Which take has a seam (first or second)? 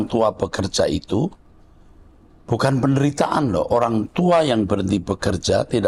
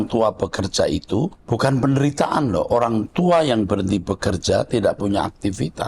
second